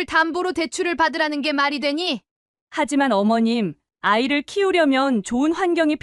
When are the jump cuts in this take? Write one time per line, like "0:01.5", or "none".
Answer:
none